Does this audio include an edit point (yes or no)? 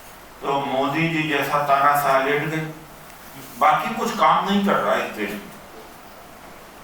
yes